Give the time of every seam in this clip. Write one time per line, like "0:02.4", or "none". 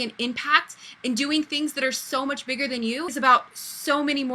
0:03.1